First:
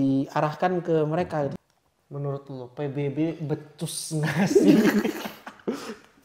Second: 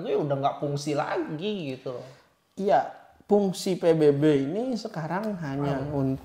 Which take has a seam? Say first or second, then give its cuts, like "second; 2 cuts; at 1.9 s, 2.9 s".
first; 1 cut; at 1.5 s